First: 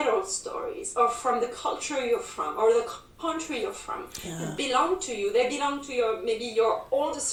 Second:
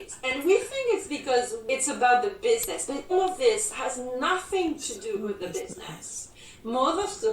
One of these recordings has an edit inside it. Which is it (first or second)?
second